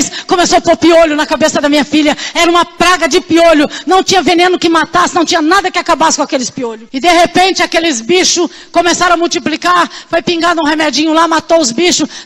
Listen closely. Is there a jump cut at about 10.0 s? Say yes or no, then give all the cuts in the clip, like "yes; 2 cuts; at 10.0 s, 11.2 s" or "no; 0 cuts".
no; 1 cut; at 6.8 s